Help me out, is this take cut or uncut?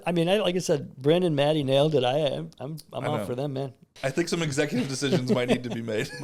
uncut